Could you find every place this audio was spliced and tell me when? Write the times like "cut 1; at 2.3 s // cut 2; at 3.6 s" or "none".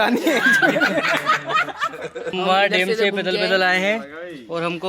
cut 1; at 2.3 s